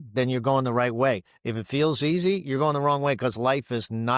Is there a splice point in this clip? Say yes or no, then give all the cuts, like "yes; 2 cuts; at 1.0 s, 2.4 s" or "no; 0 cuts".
no; 0 cuts